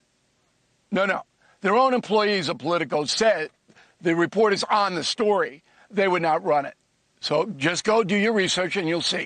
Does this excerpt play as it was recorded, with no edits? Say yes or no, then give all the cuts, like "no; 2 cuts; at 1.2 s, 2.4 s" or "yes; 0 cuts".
no; 1 cut; at 3.0 s